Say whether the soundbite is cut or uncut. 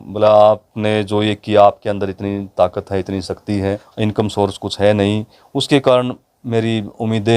cut